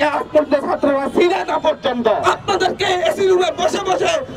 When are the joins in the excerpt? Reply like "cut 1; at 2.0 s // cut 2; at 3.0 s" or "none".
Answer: cut 1; at 2.2 s